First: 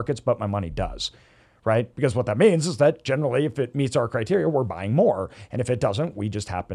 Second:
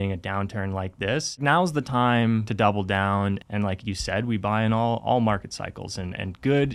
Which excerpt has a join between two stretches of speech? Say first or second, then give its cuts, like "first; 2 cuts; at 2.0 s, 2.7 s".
second; 3 cuts; at 1.4 s, 2.5 s, 3.4 s